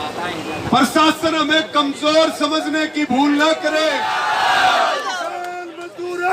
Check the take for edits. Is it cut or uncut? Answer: cut